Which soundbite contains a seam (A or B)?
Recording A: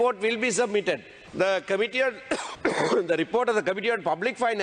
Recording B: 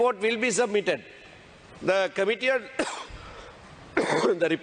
A